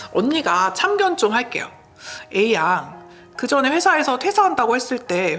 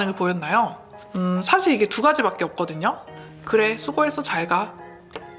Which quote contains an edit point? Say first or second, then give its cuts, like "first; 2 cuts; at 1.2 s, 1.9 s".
second; 1 cut; at 1.2 s